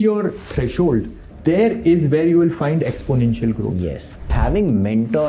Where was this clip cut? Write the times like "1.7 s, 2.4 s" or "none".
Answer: 1.2 s, 4.3 s